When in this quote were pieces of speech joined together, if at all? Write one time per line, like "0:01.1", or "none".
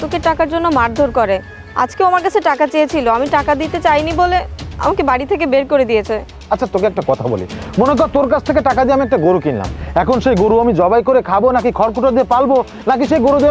0:06.3